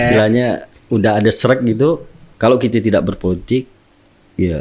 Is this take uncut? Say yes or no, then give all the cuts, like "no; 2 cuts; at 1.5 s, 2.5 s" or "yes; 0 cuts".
no; 1 cut; at 2.2 s